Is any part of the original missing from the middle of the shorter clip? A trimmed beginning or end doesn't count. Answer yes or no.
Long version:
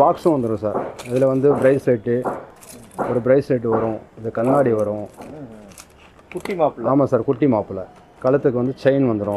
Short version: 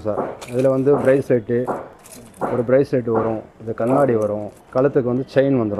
yes